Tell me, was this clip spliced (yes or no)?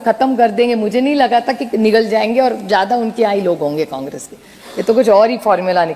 no